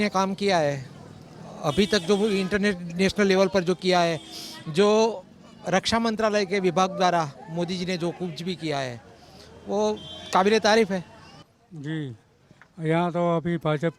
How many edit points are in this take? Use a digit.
1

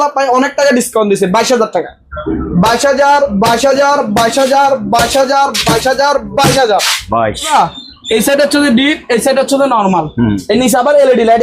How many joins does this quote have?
1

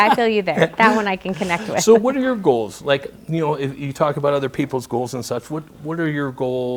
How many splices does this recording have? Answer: 0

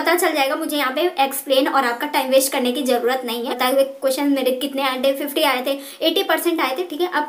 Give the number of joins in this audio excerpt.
1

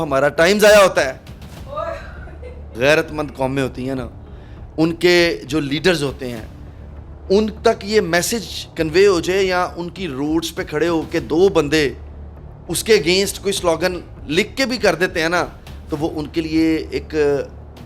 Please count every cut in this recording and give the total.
1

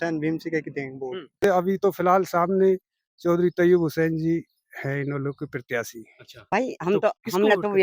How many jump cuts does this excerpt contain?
2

